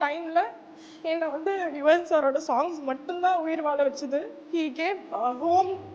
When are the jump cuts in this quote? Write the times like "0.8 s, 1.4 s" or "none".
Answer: 4.4 s